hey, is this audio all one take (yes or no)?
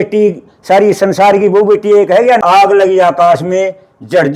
no